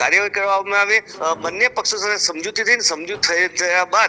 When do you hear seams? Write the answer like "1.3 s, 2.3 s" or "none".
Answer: 1.1 s